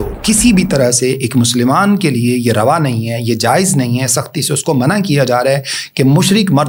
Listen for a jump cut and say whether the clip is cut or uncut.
uncut